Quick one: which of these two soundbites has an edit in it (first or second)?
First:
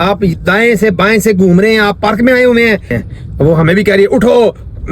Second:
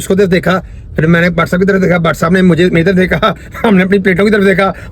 first